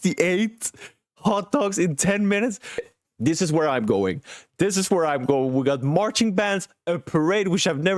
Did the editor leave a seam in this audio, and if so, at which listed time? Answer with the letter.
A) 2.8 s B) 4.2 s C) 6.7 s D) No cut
A